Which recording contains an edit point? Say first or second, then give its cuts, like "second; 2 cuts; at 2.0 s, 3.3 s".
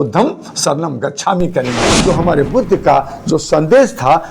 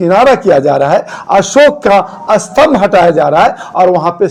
first; 1 cut; at 1.9 s